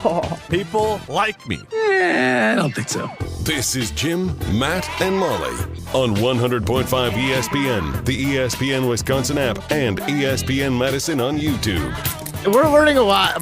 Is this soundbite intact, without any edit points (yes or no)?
no